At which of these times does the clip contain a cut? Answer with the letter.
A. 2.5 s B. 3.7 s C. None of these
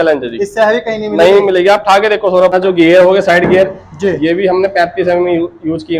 A